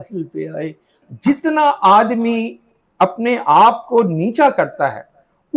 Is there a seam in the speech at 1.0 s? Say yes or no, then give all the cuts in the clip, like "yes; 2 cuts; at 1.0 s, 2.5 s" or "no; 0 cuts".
yes; 1 cut; at 1.0 s